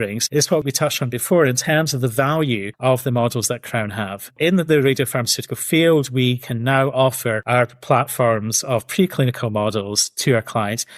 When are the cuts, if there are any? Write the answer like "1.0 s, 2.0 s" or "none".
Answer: 4.2 s

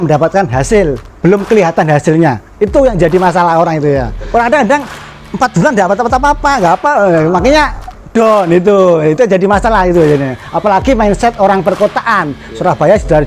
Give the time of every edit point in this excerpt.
4.2 s

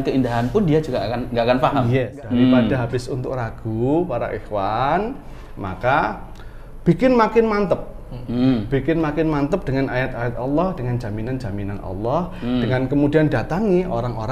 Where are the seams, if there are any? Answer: 2.1 s

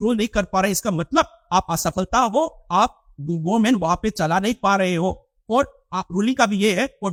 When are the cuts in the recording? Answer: none

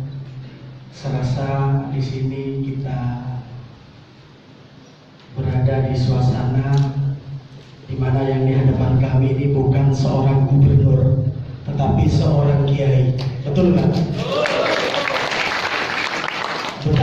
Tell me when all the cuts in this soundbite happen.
none

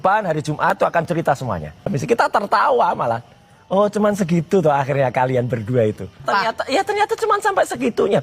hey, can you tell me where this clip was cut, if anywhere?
1.9 s, 6.2 s

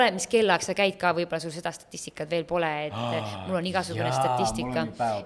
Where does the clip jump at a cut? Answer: none

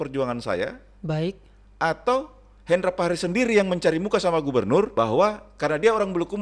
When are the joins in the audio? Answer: 4.9 s

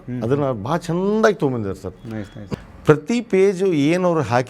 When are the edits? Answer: 2.5 s

